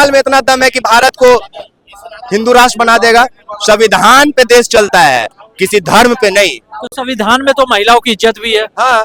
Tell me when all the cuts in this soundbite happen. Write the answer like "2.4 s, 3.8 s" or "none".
none